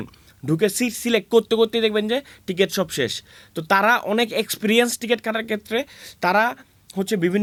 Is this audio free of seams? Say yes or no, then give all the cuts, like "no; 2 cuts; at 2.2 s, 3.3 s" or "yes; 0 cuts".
yes; 0 cuts